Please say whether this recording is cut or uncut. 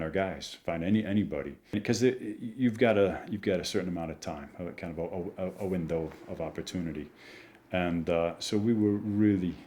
cut